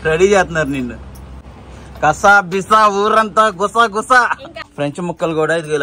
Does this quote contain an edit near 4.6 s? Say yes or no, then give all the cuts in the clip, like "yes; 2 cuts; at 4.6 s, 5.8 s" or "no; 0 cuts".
yes; 1 cut; at 4.6 s